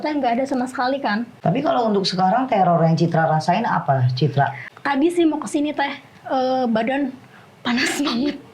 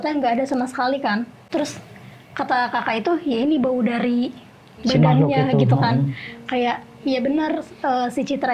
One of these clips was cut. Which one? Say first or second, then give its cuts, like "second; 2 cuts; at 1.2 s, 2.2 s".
first; 2 cuts; at 1.3 s, 4.6 s